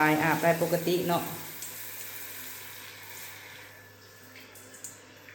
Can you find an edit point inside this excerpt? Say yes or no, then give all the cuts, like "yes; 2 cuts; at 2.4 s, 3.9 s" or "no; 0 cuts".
no; 0 cuts